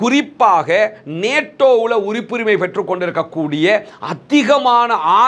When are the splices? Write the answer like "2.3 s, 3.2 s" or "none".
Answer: none

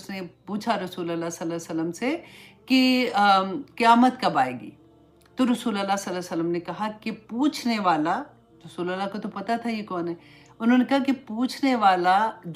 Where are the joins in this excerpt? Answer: none

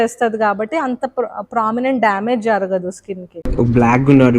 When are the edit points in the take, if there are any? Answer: 3.4 s

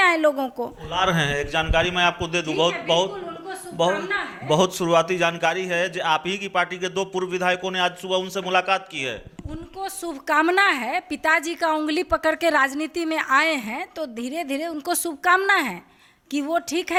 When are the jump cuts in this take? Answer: none

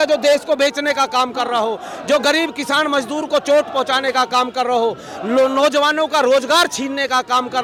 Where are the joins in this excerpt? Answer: none

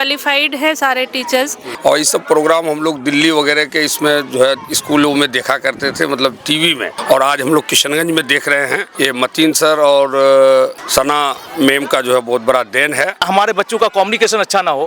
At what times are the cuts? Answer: 1.6 s, 6.9 s, 8.9 s, 10.8 s, 13.2 s

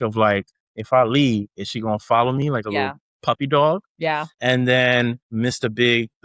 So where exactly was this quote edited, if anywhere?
4.0 s, 5.2 s

